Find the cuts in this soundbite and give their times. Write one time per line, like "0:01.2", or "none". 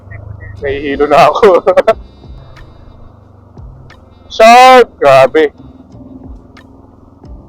0:02.4